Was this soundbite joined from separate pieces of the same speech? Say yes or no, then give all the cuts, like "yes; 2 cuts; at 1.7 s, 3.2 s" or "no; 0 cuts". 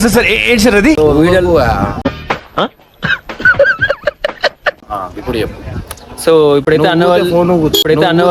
no; 0 cuts